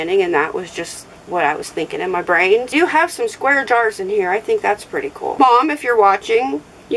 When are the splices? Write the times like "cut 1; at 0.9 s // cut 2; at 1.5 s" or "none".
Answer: cut 1; at 2.7 s // cut 2; at 5.3 s